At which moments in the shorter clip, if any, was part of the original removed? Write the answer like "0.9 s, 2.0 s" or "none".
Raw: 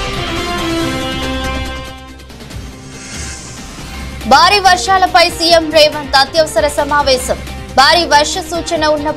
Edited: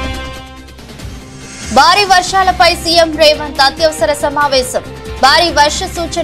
1.6 s